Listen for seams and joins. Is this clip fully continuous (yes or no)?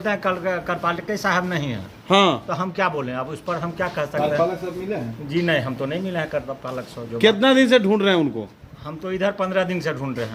yes